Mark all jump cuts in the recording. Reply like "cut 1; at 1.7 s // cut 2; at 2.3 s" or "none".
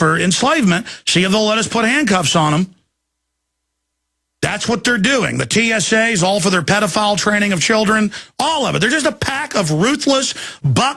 cut 1; at 5.3 s